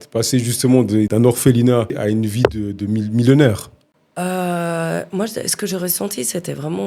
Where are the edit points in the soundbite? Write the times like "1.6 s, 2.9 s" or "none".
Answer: 1.1 s, 2.0 s